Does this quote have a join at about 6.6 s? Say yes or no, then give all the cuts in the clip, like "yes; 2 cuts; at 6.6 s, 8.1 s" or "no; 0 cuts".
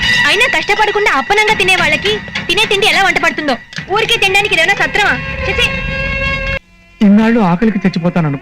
yes; 1 cut; at 6.6 s